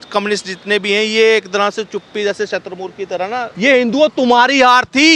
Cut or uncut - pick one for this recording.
cut